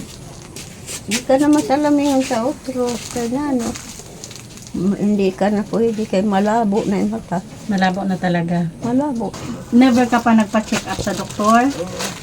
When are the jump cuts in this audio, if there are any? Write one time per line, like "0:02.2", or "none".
0:09.4